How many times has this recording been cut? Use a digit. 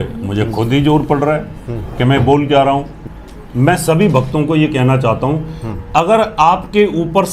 1